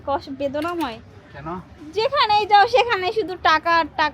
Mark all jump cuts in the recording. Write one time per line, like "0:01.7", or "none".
0:01.7